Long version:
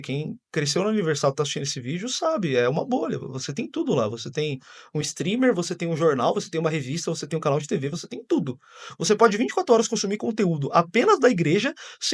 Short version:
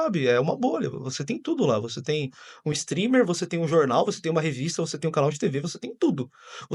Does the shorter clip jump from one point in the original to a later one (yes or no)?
no